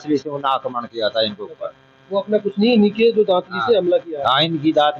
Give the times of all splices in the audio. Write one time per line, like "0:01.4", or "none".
none